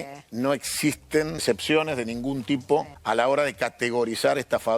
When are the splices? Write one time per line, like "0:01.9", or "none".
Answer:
0:01.4
0:02.9